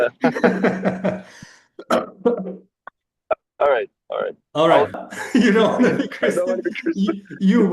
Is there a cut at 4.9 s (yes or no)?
yes